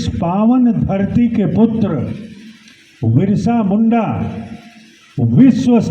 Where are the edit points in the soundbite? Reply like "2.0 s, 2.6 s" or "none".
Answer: none